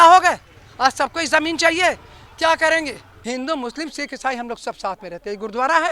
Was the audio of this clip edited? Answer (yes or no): yes